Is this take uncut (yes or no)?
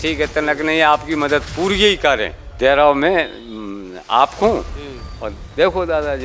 no